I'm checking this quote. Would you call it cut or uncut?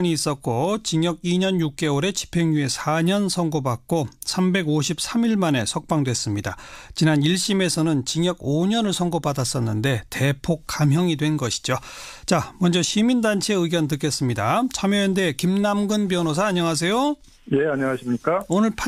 uncut